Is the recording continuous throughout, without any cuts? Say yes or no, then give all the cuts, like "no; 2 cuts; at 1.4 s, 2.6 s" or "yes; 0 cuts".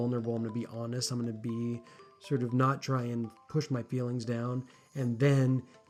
yes; 0 cuts